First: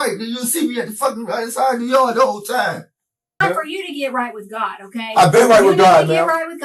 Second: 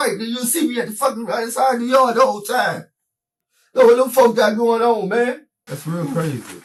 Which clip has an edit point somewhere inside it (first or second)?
first